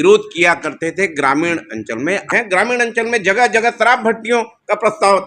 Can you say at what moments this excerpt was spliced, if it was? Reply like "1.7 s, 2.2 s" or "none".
2.3 s